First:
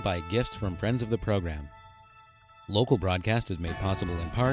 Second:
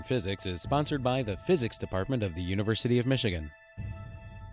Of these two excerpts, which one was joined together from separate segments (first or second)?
second